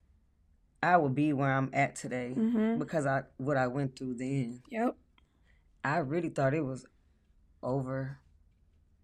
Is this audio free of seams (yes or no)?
yes